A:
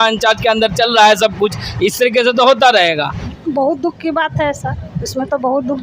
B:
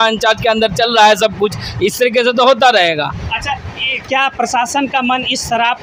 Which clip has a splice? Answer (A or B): A